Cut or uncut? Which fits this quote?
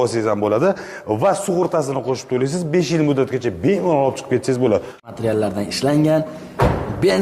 cut